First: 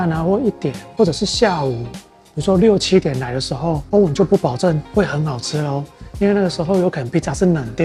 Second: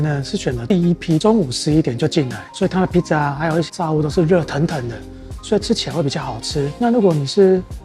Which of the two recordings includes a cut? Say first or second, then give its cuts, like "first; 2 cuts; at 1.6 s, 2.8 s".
second; 2 cuts; at 1.2 s, 3.7 s